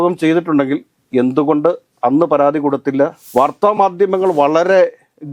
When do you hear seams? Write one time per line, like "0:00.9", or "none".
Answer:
0:03.2

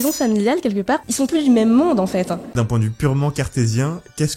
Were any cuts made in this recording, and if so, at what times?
0:01.0
0:02.6

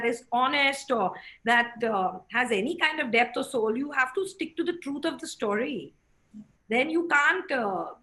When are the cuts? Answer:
none

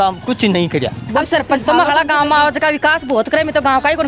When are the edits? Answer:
0:01.0

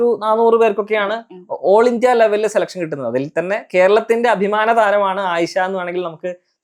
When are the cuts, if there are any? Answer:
none

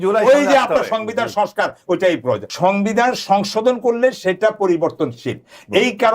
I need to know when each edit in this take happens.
0:02.5

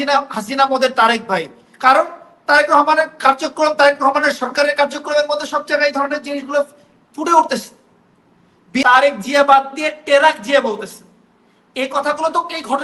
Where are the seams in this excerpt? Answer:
0:08.8

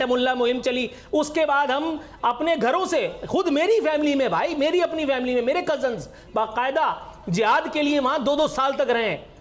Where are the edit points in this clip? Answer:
none

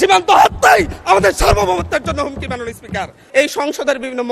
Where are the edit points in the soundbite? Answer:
0:03.2

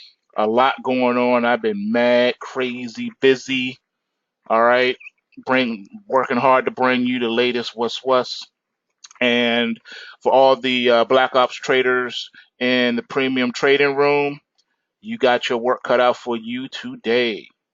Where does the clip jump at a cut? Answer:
0:12.8

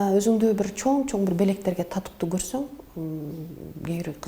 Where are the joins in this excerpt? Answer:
none

